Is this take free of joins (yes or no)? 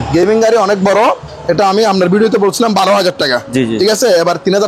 yes